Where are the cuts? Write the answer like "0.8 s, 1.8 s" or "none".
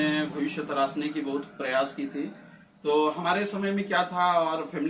none